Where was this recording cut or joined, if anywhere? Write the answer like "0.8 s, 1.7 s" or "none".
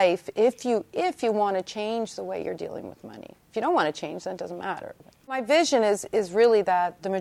5.4 s